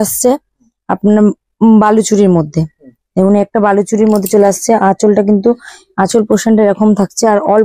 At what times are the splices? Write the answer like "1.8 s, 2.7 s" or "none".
none